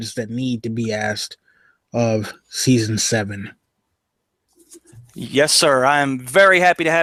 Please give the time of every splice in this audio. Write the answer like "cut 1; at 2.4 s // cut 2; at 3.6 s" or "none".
none

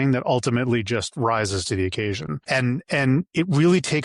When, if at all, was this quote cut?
cut 1; at 2.3 s

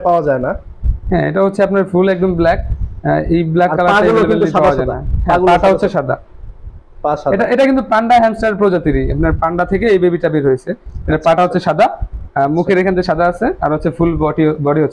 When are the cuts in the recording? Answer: none

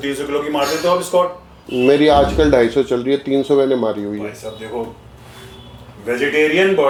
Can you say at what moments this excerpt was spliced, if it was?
none

